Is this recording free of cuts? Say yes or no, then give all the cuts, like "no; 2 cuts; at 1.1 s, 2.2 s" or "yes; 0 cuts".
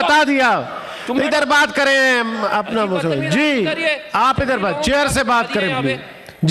yes; 0 cuts